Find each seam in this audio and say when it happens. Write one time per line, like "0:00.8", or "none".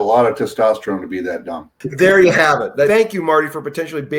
0:01.8
0:02.9